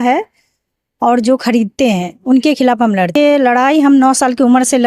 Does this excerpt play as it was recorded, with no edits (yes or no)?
no